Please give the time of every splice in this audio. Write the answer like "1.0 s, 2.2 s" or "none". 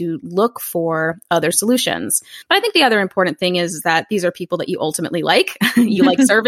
2.3 s